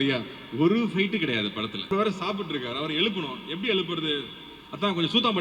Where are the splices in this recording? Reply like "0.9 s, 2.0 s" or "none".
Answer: 1.9 s